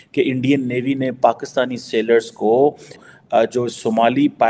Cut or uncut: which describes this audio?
cut